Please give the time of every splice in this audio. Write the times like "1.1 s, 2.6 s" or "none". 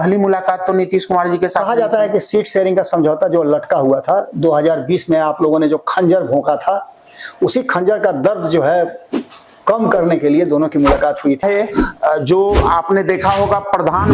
11.4 s